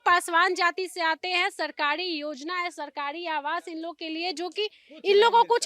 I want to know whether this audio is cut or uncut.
uncut